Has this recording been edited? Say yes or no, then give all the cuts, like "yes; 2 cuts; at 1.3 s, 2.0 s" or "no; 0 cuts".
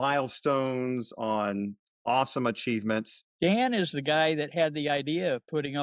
yes; 1 cut; at 3.3 s